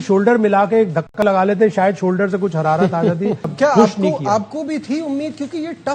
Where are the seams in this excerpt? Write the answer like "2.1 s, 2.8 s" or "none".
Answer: 3.5 s